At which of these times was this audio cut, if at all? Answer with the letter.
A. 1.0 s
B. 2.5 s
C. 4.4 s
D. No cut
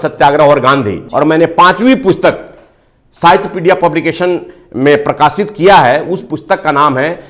A